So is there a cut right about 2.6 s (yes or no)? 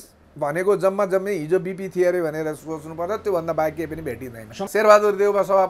no